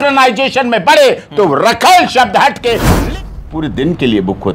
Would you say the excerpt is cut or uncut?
cut